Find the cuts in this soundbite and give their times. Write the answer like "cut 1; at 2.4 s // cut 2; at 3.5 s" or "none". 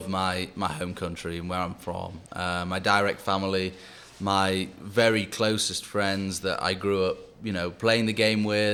none

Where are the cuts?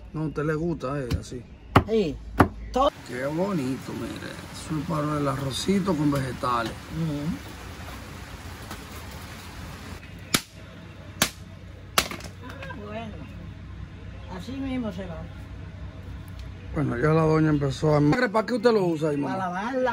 cut 1; at 2.9 s // cut 2; at 10.0 s // cut 3; at 18.1 s

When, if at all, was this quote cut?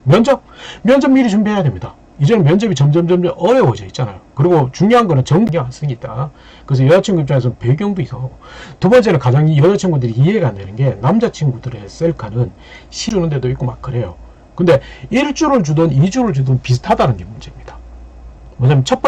cut 1; at 5.5 s // cut 2; at 13.1 s

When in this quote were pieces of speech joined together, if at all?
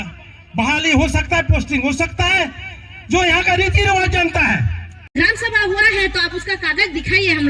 cut 1; at 5.2 s

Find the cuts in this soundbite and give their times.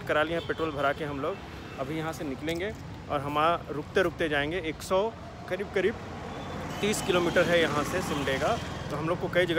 none

